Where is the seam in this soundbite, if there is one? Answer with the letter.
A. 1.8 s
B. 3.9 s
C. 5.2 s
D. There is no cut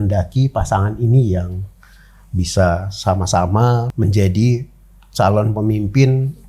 B